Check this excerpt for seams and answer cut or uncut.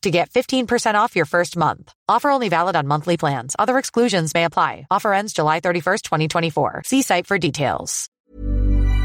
cut